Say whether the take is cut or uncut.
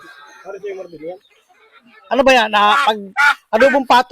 uncut